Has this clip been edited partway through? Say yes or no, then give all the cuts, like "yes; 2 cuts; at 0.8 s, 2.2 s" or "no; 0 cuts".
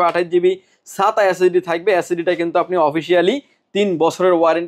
no; 0 cuts